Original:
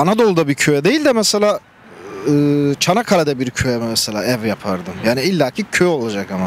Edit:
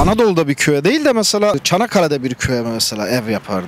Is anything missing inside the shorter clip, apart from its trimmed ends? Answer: yes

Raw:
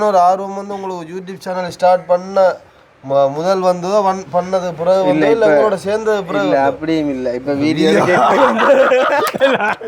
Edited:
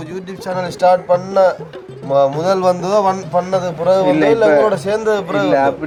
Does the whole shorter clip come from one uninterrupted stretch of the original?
yes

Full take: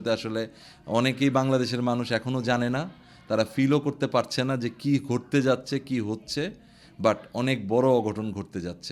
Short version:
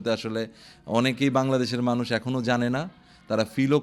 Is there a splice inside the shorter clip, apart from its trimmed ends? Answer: no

